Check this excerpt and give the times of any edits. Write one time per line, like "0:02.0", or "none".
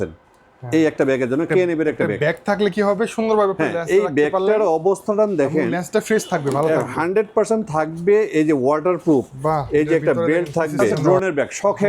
0:11.0